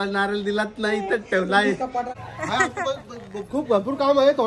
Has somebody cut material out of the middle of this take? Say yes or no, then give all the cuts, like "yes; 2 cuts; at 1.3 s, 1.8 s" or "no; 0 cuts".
yes; 1 cut; at 2.1 s